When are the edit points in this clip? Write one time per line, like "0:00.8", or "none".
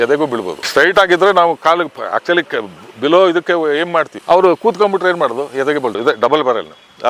0:06.0